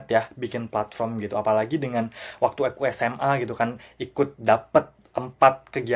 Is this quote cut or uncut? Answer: uncut